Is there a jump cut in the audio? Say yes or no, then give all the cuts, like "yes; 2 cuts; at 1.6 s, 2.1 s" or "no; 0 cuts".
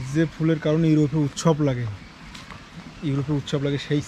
no; 0 cuts